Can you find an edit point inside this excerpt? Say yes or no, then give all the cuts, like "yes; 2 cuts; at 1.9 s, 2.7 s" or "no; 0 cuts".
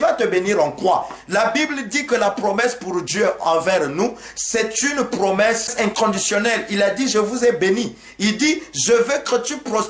yes; 1 cut; at 5.7 s